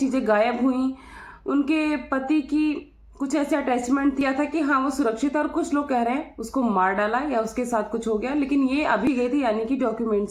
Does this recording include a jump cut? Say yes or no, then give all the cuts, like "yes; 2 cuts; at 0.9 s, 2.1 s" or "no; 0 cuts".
yes; 2 cuts; at 4.2 s, 9.1 s